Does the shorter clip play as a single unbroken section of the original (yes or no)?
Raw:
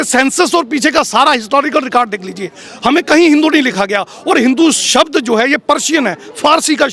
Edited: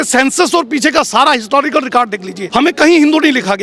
no